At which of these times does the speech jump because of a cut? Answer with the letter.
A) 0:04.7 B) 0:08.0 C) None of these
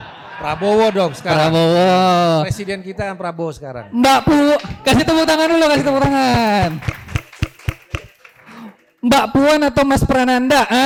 C